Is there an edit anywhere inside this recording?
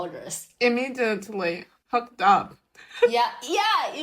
no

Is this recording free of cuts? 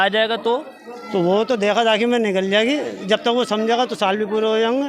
yes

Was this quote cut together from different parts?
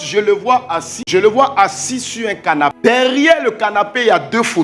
yes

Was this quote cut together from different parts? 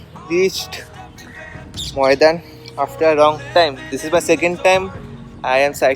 no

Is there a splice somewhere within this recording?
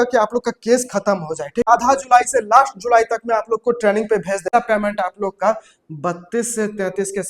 yes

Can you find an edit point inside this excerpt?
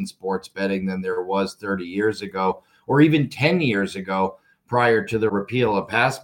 yes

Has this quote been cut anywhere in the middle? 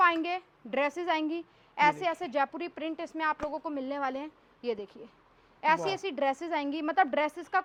no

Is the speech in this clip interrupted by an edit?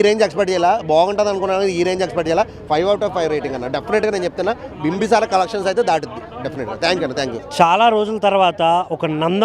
no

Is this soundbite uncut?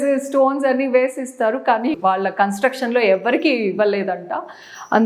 yes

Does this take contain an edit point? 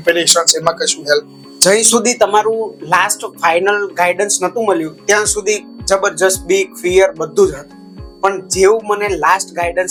no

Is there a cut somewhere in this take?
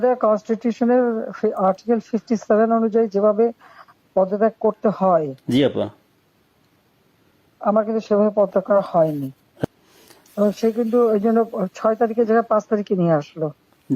yes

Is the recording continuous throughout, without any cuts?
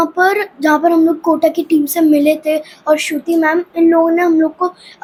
yes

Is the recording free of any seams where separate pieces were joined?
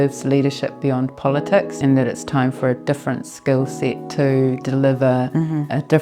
no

